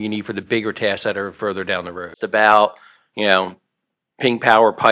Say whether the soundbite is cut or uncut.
cut